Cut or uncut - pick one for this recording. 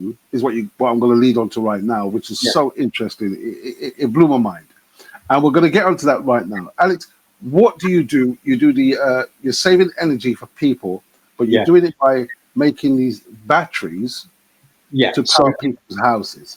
uncut